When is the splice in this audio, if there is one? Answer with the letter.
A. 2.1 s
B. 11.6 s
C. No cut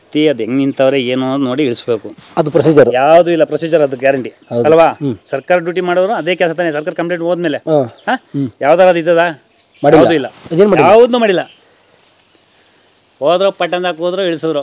C